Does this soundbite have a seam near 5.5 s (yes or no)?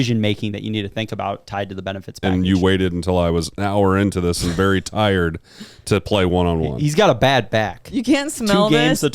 no